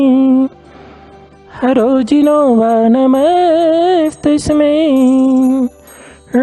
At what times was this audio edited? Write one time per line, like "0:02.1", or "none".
none